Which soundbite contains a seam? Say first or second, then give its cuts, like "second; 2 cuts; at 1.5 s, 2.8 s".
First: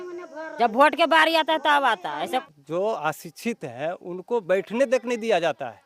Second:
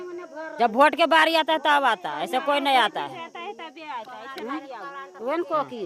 first; 1 cut; at 2.4 s